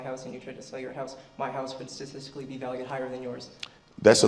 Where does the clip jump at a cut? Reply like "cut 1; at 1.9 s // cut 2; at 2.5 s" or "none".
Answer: none